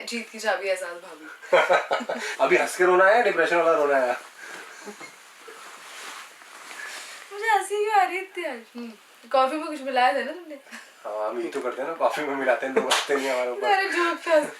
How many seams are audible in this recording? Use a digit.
1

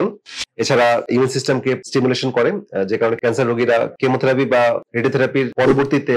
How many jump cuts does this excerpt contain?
0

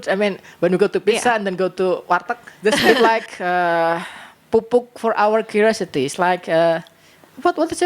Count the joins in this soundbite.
1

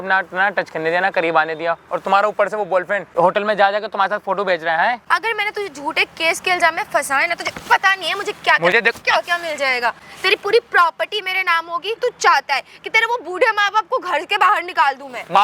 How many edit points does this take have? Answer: 3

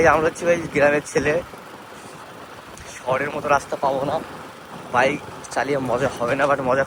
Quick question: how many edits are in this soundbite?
0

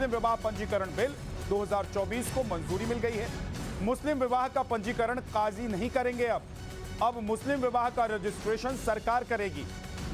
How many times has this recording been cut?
1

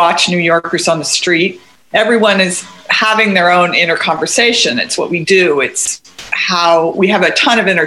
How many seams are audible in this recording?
1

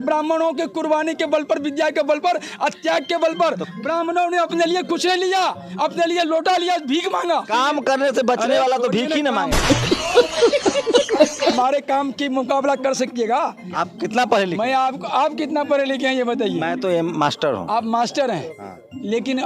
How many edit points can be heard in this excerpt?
4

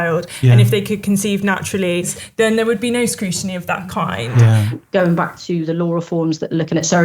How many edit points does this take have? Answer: 2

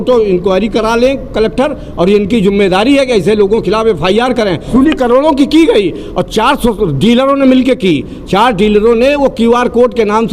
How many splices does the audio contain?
1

